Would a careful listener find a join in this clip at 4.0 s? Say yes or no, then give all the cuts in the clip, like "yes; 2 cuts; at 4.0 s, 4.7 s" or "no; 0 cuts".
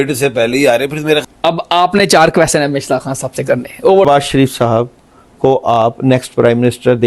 yes; 2 cuts; at 1.2 s, 4.0 s